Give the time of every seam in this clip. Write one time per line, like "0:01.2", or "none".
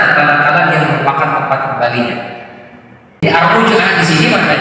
0:03.1